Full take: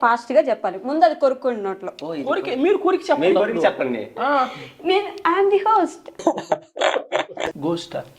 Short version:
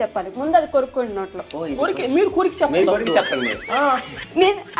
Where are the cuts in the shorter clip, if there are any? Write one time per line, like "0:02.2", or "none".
none